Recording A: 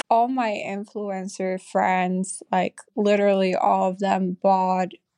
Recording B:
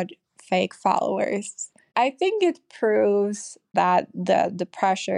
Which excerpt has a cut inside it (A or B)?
B